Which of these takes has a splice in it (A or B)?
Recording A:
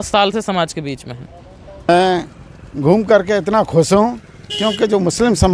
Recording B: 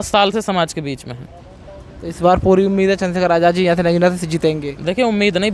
A